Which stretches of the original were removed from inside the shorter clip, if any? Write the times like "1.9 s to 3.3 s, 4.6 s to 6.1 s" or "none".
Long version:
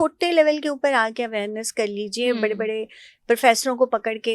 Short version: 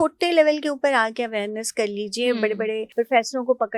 2.9 s to 3.2 s